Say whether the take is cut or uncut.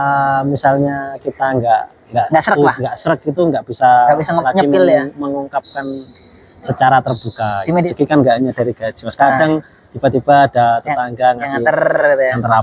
cut